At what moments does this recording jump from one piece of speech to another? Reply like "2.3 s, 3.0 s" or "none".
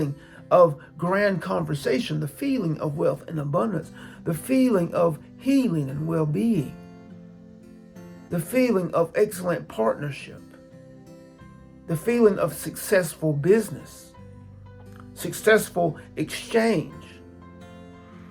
10.4 s, 11.8 s